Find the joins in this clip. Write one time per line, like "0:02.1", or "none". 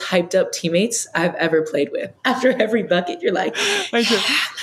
0:02.1